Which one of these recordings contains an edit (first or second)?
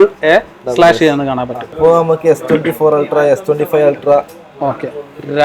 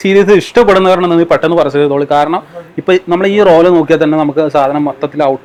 first